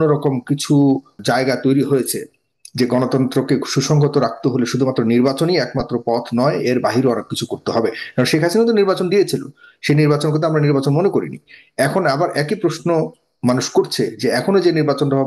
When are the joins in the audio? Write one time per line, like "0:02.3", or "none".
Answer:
0:01.1